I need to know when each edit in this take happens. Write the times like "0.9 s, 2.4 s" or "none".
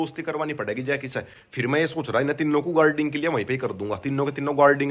none